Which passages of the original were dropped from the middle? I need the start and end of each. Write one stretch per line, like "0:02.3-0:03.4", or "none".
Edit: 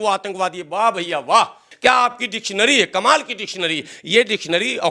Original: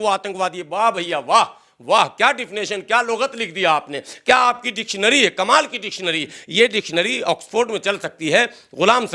0:01.6-0:04.1